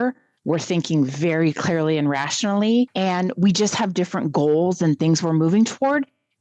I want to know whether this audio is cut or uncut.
cut